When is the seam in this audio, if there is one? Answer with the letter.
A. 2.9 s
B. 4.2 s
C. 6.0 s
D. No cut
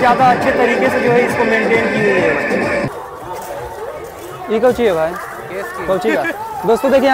A